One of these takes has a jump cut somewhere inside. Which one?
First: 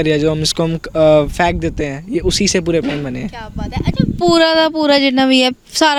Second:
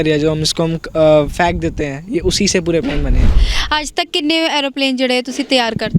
second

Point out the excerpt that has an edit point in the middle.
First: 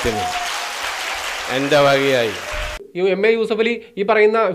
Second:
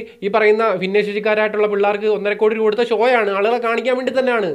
first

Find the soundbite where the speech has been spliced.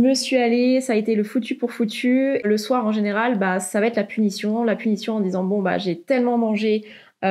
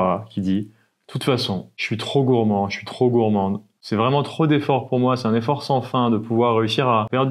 first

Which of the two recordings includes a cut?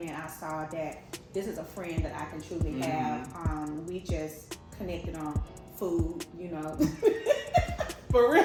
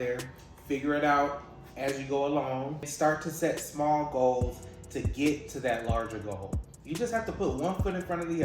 second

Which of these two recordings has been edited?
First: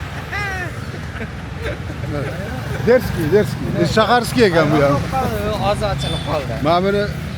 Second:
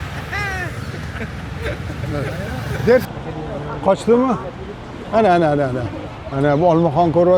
second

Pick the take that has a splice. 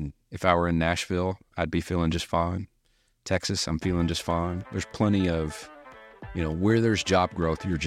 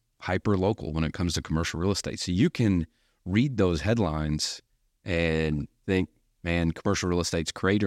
second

